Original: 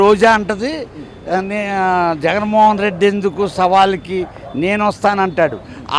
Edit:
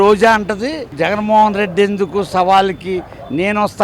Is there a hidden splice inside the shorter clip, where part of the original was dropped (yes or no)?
yes